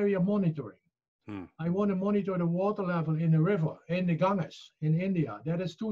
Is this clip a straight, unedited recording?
yes; 0 cuts

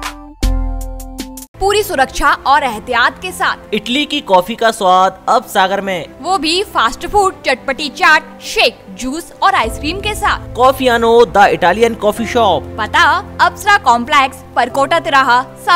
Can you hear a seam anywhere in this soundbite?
no; 0 cuts

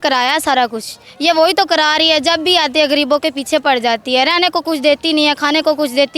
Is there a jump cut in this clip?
no; 0 cuts

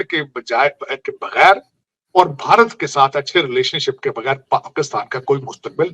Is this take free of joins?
yes; 0 cuts

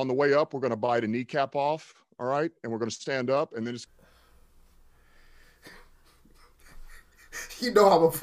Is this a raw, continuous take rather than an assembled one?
no; 1 cut; at 3.9 s

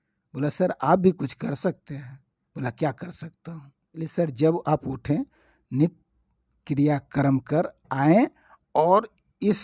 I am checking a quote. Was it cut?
yes; 1 cut; at 4.0 s

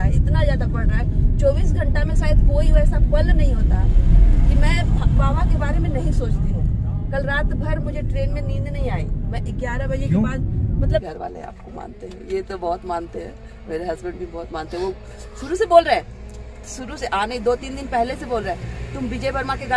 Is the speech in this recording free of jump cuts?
no; 1 cut; at 11.0 s

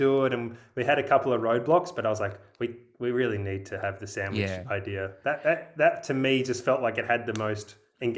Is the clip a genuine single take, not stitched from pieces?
yes; 0 cuts

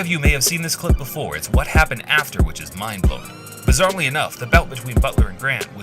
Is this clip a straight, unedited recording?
yes; 0 cuts

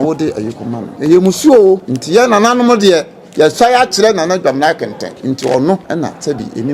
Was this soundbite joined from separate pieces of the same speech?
yes; 4 cuts; at 0.9 s, 1.9 s, 5.1 s, 5.8 s

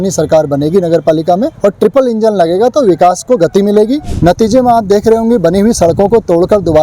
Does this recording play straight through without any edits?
no; 2 cuts; at 1.5 s, 4.1 s

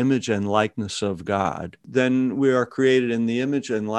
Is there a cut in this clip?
yes; 1 cut; at 1.8 s

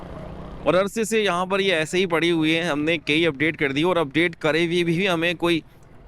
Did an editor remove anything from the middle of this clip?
no; 0 cuts

